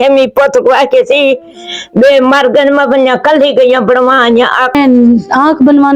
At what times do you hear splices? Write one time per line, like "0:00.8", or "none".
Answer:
0:04.7